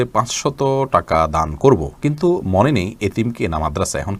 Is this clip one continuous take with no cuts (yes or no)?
yes